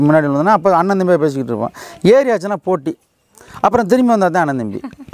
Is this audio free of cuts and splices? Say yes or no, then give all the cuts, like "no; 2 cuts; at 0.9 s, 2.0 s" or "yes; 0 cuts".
yes; 0 cuts